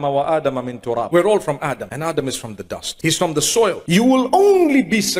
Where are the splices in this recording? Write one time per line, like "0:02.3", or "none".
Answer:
0:01.1
0:01.9
0:02.8
0:04.3

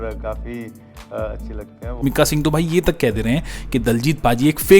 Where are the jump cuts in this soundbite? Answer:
0:02.0

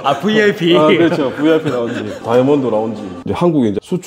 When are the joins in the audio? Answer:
0:02.1
0:03.2

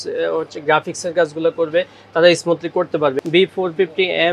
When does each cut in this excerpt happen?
0:03.2

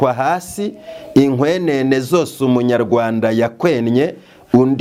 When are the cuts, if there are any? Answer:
none

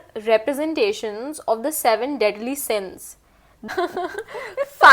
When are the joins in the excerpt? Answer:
0:03.7

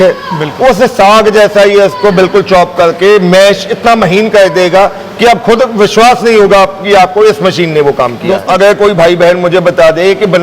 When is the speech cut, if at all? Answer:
0:08.4

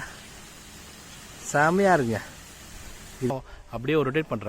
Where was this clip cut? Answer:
0:03.3

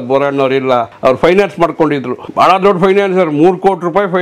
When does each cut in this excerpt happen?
0:00.9
0:02.2

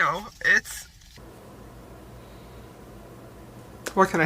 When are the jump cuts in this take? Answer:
0:01.0

